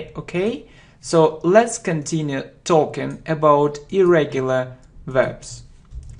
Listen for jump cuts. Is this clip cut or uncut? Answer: cut